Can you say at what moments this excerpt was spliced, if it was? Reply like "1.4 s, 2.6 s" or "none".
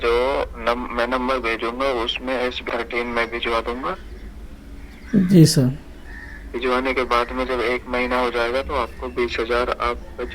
2.6 s

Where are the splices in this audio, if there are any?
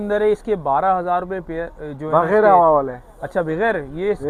none

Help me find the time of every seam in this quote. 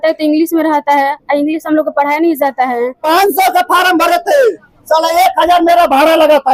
3.0 s

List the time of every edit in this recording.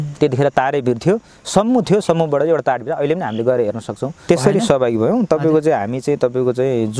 4.2 s

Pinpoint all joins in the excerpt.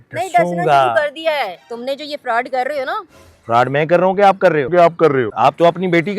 1.7 s, 4.9 s

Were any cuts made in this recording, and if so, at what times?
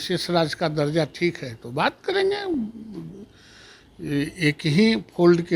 none

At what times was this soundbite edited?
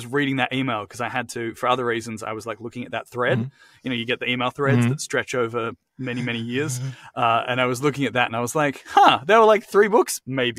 none

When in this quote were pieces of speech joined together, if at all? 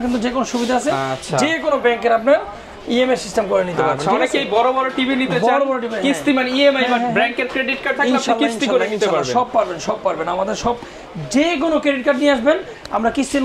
none

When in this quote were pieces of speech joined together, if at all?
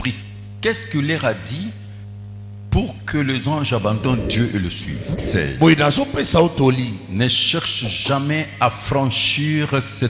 5.1 s

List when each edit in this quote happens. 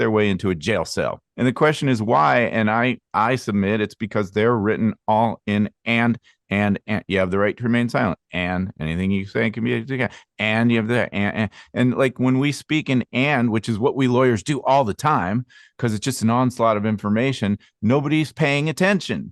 1.2 s

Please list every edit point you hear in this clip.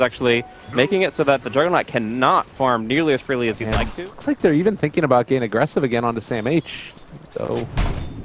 none

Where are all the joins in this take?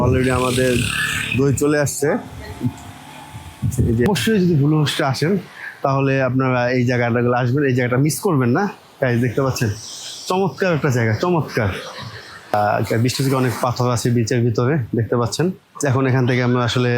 4.1 s, 12.5 s

